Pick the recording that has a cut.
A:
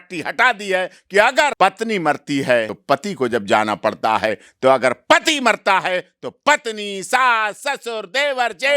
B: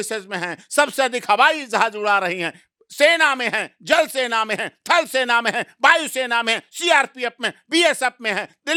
A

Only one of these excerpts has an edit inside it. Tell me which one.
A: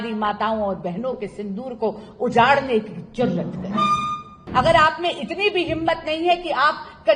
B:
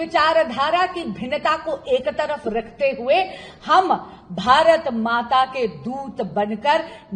A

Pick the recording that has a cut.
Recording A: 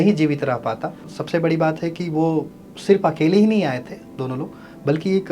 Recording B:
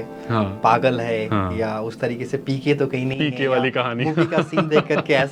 A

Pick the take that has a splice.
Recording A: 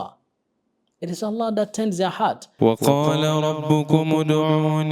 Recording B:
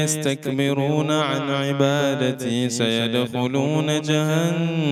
A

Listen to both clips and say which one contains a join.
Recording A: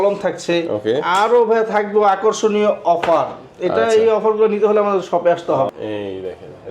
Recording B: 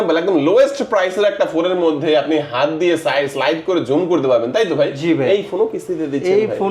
A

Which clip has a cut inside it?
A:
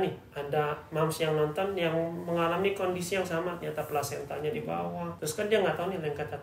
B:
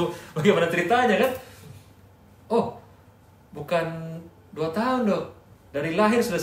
A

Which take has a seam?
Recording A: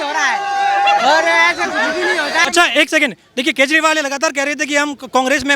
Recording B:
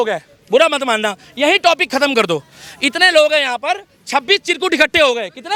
A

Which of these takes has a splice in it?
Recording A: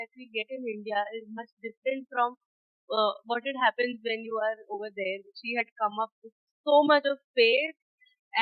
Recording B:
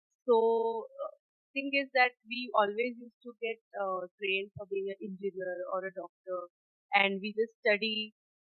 A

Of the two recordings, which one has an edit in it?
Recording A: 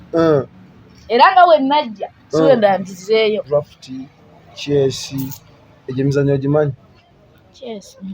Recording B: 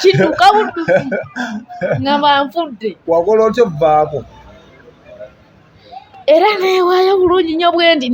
A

